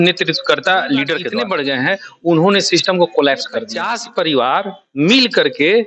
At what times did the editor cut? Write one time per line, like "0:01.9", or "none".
0:01.3
0:04.0

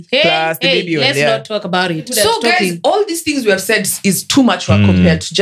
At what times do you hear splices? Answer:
0:02.1

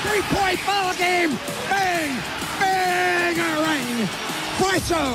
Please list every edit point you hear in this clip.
none

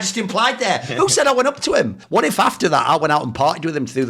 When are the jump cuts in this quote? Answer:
0:02.0

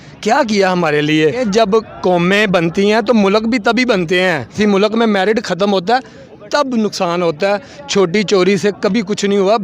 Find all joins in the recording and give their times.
0:01.4
0:04.5

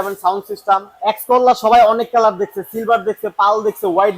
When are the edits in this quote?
0:00.9

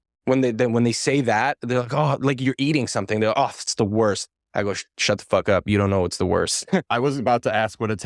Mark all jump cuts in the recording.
0:06.9

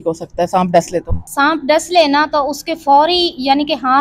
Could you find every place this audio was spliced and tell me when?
0:01.2

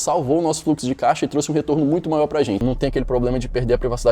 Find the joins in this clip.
0:02.6

